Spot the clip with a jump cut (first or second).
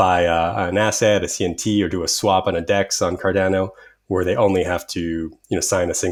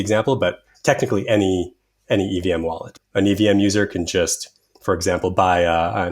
second